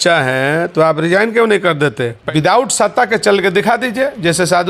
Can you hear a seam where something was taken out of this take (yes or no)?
yes